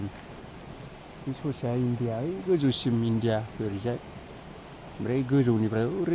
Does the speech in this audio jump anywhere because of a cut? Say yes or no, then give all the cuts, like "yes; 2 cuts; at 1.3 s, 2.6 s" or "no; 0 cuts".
no; 0 cuts